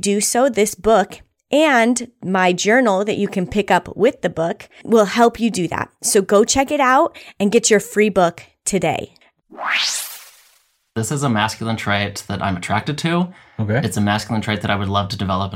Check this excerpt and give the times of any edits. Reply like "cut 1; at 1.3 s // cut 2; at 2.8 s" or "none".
cut 1; at 9.2 s // cut 2; at 10.8 s